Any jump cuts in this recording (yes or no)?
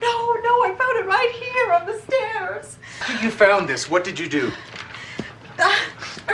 yes